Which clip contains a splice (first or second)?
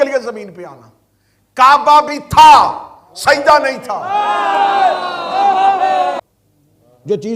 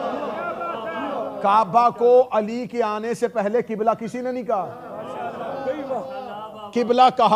first